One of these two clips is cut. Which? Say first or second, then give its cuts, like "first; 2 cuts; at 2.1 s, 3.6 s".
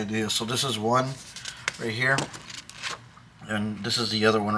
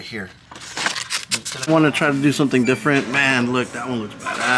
second; 1 cut; at 1.7 s